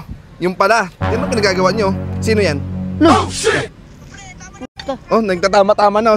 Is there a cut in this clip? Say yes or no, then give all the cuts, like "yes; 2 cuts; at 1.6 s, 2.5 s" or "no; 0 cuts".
no; 0 cuts